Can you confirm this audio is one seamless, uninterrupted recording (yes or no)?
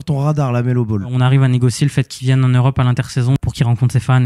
no